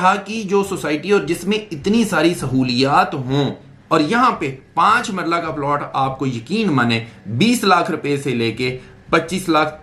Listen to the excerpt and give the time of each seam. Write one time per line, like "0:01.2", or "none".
0:03.7